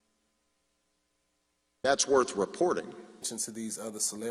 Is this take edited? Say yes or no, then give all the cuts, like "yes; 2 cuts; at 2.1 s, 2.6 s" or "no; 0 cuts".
yes; 1 cut; at 3.3 s